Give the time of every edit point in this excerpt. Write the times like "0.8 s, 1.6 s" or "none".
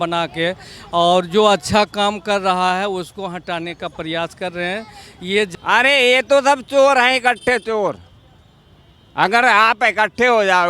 5.5 s